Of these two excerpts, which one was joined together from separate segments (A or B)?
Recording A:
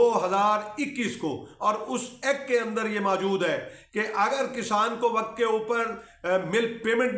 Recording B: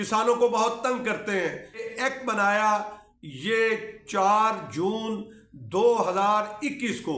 B